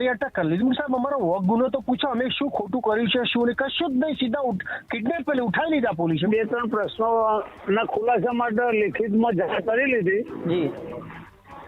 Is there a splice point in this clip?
yes; 1 cut; at 6.3 s

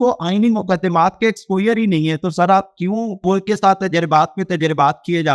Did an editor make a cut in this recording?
yes; 1 cut; at 3.2 s

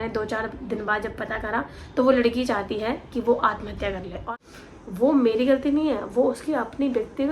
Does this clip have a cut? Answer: yes; 1 cut; at 4.3 s

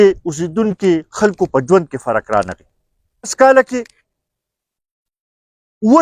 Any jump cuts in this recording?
yes; 1 cut; at 3.3 s

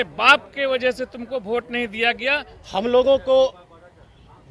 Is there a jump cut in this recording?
yes; 1 cut; at 2.5 s

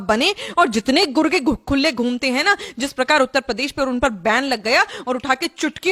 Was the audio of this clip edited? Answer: no; 0 cuts

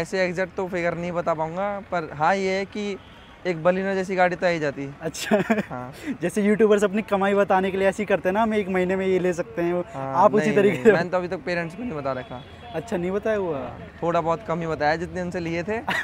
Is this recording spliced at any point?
no; 0 cuts

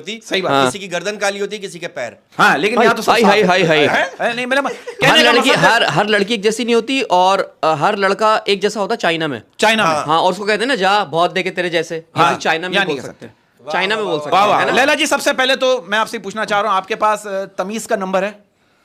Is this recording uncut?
yes; 0 cuts

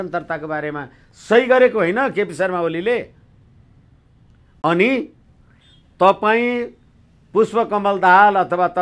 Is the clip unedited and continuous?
yes; 0 cuts

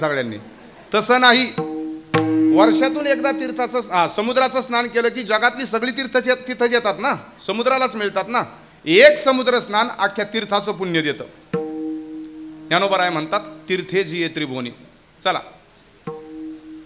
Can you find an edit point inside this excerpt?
no; 0 cuts

